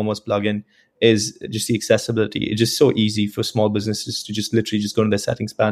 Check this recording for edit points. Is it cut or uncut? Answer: uncut